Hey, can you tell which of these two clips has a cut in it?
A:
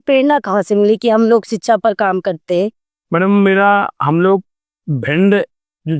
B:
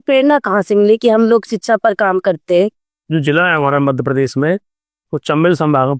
B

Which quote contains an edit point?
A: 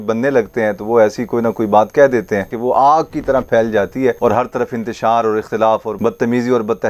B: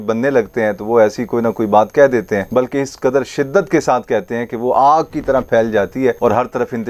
A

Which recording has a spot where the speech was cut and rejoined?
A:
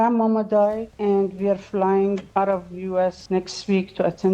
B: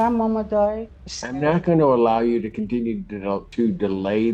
B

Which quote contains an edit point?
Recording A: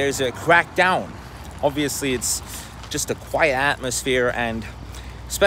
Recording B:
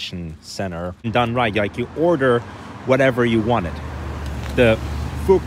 B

